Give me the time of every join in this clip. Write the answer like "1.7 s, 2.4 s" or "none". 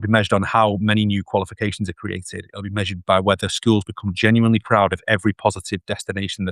none